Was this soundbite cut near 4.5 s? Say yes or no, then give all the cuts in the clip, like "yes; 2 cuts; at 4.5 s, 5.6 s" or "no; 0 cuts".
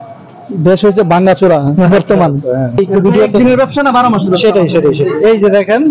no; 1 cut; at 2.8 s